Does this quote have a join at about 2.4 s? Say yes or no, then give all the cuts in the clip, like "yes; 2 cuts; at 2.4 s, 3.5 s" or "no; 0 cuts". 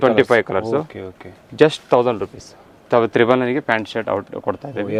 no; 0 cuts